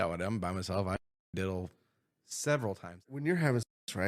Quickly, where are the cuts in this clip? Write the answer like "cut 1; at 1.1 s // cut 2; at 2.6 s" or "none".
cut 1; at 3.0 s